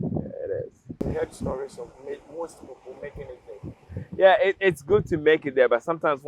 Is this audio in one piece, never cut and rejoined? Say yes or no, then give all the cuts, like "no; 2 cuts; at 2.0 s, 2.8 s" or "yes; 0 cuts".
no; 1 cut; at 1.0 s